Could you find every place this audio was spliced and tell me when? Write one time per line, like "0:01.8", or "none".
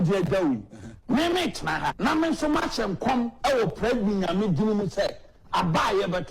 0:02.0